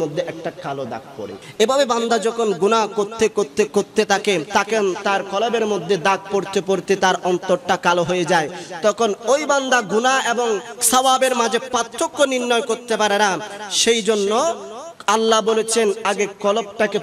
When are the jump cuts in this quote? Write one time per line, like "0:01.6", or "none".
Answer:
0:01.4
0:04.5
0:10.7